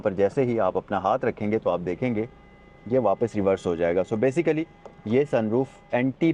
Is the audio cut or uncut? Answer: uncut